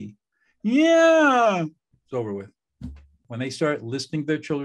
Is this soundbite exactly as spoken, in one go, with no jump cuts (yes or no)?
no